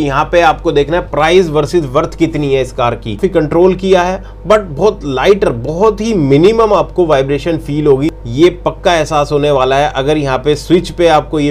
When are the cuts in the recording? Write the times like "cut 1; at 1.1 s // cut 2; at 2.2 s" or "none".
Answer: cut 1; at 3.2 s // cut 2; at 8.2 s